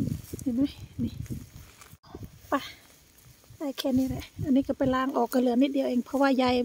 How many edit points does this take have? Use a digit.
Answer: 1